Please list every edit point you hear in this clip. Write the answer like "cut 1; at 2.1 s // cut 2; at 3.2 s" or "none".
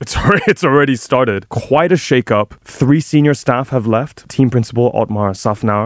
cut 1; at 1.5 s // cut 2; at 2.6 s // cut 3; at 4.2 s

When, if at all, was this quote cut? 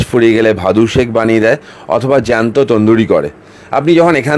none

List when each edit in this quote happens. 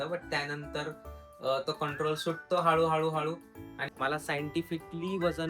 cut 1; at 3.9 s

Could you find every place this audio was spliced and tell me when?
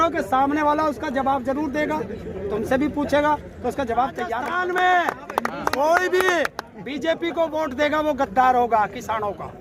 cut 1; at 4.4 s

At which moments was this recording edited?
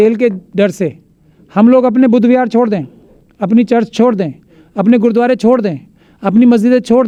none

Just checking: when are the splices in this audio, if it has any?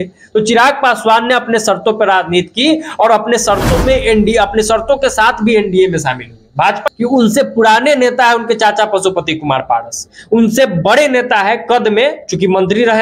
cut 1; at 6.8 s

